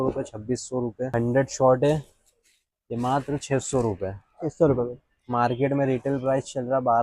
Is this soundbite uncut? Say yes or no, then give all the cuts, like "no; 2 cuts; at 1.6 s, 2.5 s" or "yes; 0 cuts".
no; 1 cut; at 1.1 s